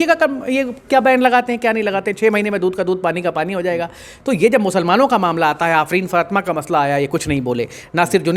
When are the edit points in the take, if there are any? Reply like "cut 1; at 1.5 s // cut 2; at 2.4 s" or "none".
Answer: none

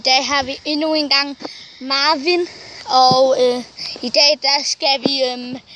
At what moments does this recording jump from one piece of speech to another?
none

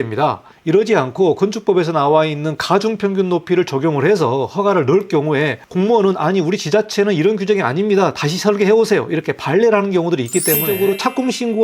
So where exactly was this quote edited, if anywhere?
cut 1; at 5.6 s // cut 2; at 10.7 s

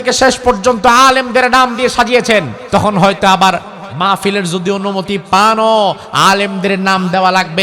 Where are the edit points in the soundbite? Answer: cut 1; at 2.6 s

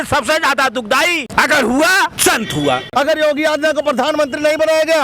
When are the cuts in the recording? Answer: cut 1; at 1.3 s // cut 2; at 2.6 s

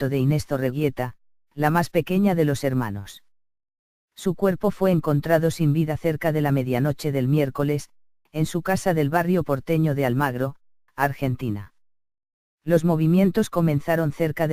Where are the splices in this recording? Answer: none

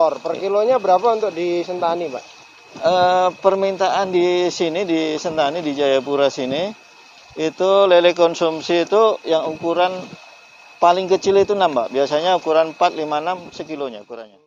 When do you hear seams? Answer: none

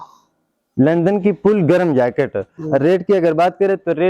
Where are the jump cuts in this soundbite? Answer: cut 1; at 2.5 s

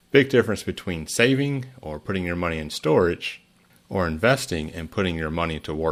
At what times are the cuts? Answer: none

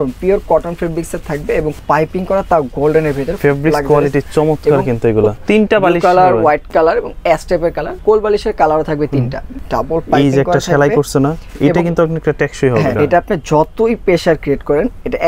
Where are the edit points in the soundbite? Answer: cut 1; at 1.8 s // cut 2; at 5.4 s // cut 3; at 8.0 s // cut 4; at 9.4 s // cut 5; at 12.9 s

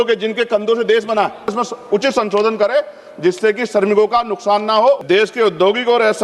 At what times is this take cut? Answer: cut 1; at 1.6 s // cut 2; at 5.0 s

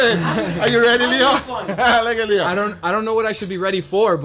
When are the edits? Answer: none

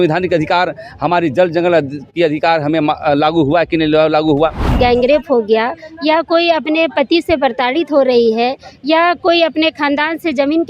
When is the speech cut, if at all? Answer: cut 1; at 4.7 s

